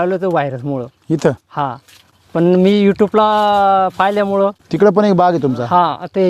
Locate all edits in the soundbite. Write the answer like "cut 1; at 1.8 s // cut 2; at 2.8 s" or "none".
none